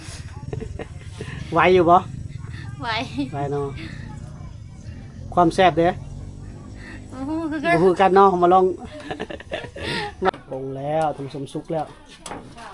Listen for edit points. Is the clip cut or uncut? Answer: cut